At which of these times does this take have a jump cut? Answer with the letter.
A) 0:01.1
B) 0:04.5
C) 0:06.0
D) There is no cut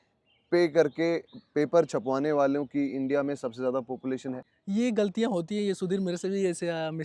B